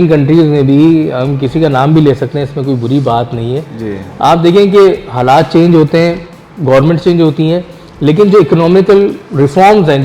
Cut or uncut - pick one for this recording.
uncut